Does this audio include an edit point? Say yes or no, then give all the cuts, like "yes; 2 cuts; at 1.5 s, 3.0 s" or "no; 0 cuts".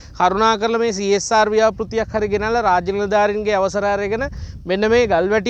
no; 0 cuts